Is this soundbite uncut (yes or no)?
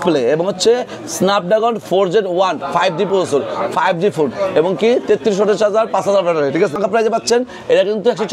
no